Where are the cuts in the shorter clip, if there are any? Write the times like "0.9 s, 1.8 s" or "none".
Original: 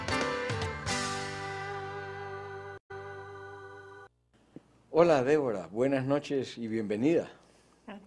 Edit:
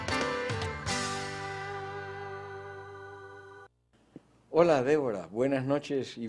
2.7 s